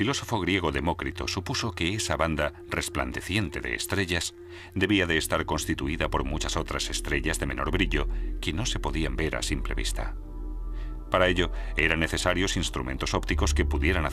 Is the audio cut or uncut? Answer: cut